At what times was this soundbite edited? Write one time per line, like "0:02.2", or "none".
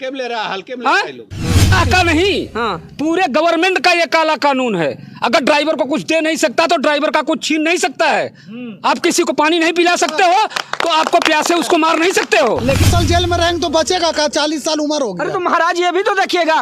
0:01.7
0:12.9

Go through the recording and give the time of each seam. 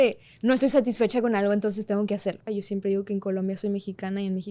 0:02.4

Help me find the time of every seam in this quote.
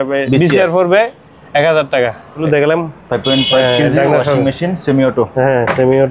0:02.4

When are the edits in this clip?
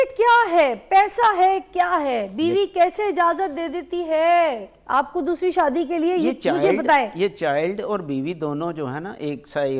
none

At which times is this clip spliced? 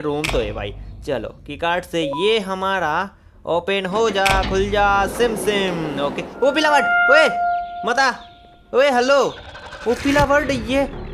none

